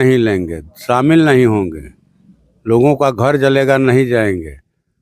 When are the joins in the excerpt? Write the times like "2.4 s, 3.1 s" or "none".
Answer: none